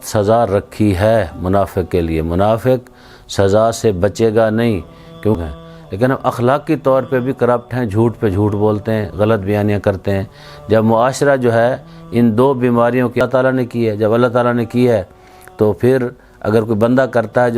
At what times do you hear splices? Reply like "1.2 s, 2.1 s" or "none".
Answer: 5.4 s, 13.2 s